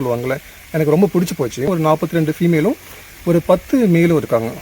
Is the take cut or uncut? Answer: cut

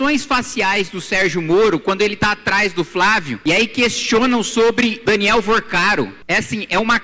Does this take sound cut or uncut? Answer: cut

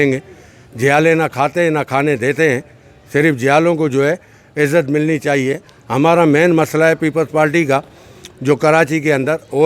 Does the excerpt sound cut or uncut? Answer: uncut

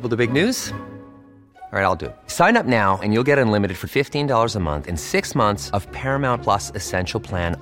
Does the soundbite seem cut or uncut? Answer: uncut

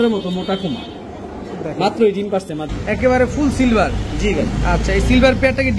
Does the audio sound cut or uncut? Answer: cut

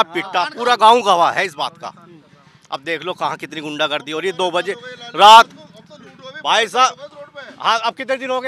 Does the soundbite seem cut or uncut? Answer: uncut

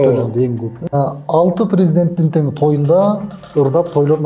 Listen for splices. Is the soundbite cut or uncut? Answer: cut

